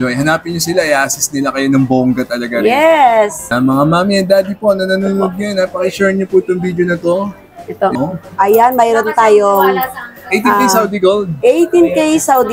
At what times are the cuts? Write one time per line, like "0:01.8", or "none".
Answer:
0:03.4
0:07.9